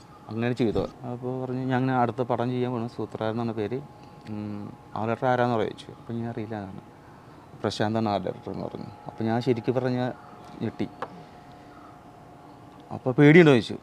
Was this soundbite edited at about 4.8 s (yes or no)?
no